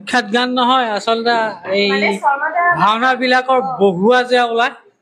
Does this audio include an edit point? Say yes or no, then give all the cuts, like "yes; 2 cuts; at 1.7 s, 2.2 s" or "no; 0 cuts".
no; 0 cuts